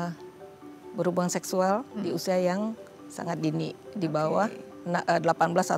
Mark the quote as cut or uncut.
uncut